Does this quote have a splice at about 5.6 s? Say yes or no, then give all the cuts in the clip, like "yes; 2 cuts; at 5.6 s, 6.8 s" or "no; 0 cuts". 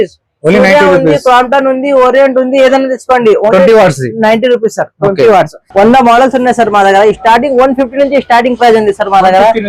yes; 1 cut; at 5.6 s